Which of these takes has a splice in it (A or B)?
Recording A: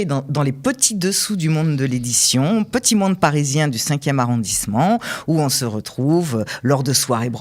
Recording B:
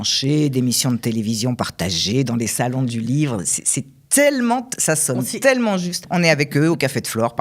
B